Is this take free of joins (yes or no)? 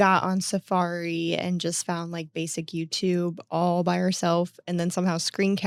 yes